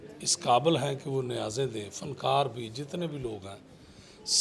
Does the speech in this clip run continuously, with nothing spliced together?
yes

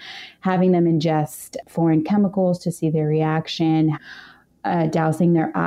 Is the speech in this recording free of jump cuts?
yes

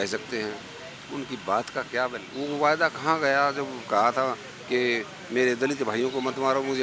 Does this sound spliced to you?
yes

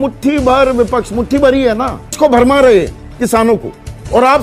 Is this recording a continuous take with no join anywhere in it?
no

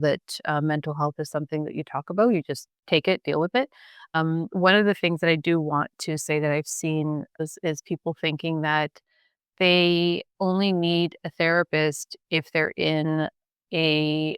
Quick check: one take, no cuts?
no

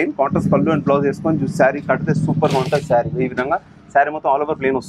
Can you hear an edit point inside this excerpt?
no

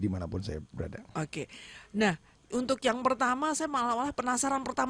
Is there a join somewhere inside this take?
no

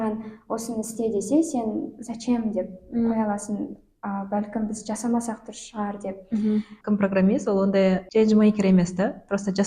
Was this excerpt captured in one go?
no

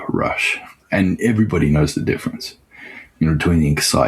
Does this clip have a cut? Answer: no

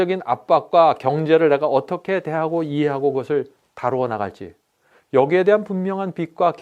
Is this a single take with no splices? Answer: yes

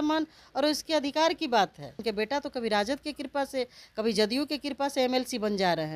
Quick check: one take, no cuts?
no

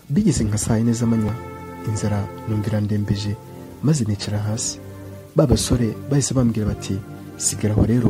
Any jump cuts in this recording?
no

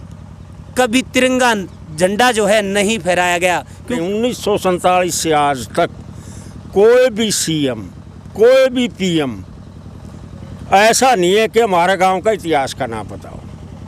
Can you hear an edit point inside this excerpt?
yes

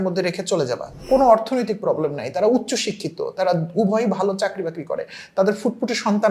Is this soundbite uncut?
no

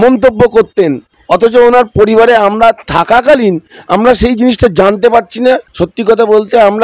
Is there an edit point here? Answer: yes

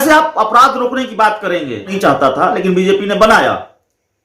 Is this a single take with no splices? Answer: no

